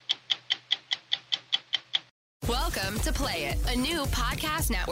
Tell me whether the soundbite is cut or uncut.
cut